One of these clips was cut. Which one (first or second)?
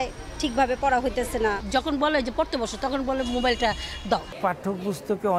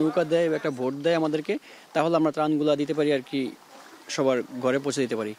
first